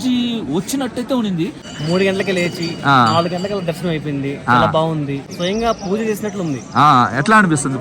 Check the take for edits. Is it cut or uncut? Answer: cut